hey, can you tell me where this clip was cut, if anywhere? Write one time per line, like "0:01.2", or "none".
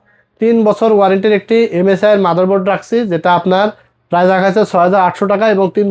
none